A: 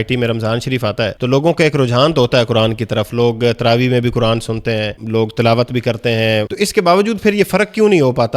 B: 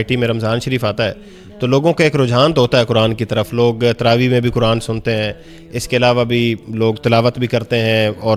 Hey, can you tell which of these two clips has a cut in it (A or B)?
A